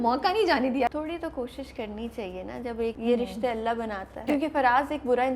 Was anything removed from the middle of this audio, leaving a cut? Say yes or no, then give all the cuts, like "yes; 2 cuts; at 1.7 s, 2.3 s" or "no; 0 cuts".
yes; 3 cuts; at 0.9 s, 3.0 s, 4.1 s